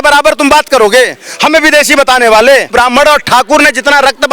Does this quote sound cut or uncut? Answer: cut